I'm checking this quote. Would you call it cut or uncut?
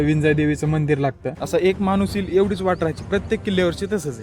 cut